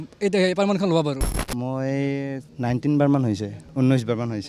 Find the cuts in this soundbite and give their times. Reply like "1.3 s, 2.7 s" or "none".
1.3 s, 2.5 s, 3.6 s